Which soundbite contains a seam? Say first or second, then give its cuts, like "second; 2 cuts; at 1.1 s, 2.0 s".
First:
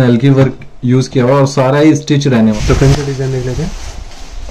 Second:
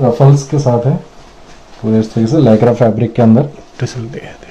first; 1 cut; at 2.5 s